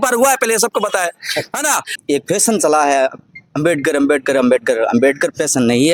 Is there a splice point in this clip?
yes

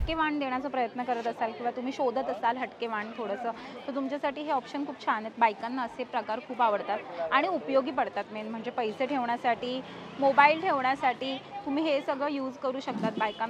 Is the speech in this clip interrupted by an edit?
no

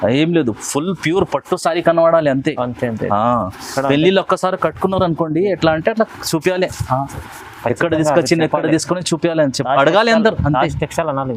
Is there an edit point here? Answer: no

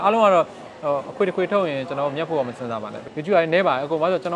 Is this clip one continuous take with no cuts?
no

